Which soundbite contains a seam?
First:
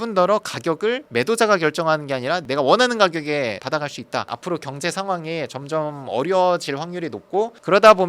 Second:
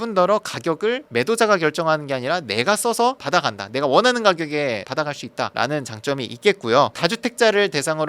first; 2 cuts; at 2.4 s, 4.3 s

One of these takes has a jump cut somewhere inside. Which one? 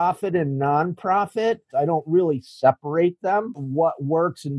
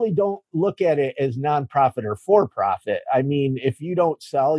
first; 2 cuts; at 1.6 s, 3.6 s

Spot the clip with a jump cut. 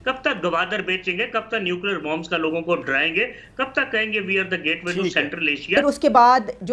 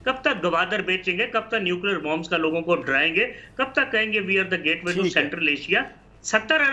first; 1 cut; at 5.8 s

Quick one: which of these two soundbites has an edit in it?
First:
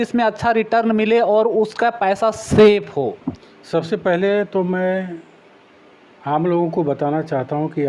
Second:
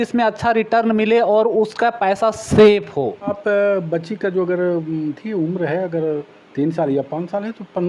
second; 1 cut; at 3.4 s

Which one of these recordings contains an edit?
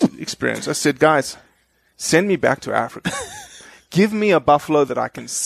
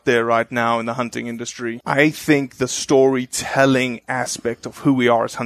second; 1 cut; at 1.8 s

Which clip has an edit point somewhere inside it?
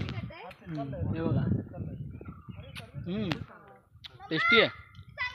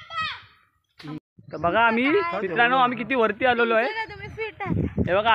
second; 1 cut; at 1.2 s

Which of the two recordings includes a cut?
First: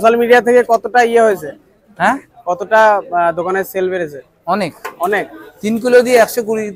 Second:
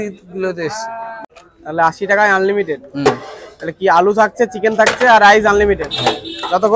second; 1 cut; at 1.1 s

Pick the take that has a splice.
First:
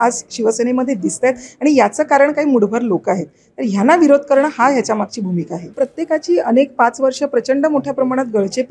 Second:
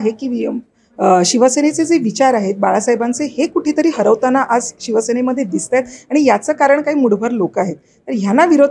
first; 1 cut; at 5.6 s

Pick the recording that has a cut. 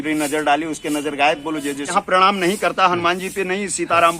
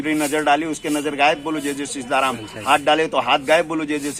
first; 1 cut; at 1.9 s

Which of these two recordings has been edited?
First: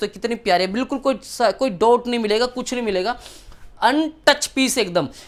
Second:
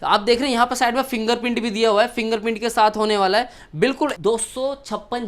second; 1 cut; at 4.1 s

